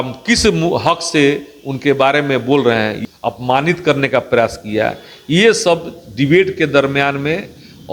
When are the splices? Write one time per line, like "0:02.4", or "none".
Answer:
0:03.0